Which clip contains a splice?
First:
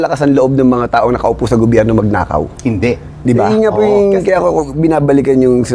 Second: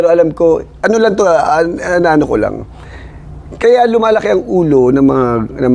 first; 1 cut; at 3.5 s

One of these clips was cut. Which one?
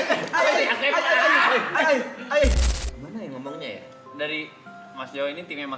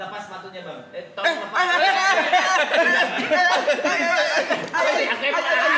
first; 1 cut; at 2.6 s

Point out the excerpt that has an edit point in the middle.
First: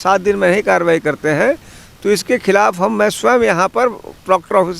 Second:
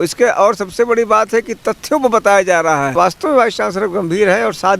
second; 1 cut; at 2.9 s

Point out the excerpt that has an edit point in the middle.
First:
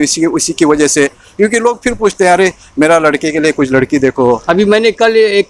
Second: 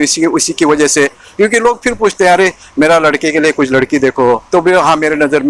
first; 1 cut; at 4.4 s

